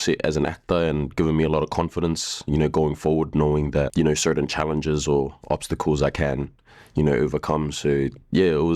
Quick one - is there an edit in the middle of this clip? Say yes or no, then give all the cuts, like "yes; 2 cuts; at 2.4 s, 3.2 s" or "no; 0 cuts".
yes; 1 cut; at 3.9 s